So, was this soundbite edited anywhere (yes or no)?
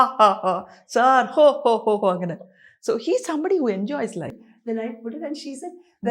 yes